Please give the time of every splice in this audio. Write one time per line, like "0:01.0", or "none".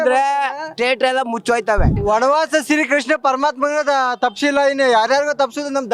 0:01.9